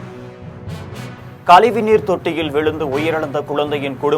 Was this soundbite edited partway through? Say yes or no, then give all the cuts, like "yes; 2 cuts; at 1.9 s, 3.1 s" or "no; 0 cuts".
yes; 1 cut; at 1.1 s